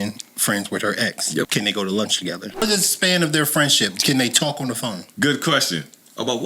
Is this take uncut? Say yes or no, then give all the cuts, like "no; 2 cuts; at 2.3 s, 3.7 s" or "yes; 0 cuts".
no; 2 cuts; at 1.5 s, 2.6 s